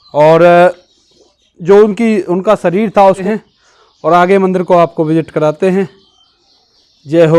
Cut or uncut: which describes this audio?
cut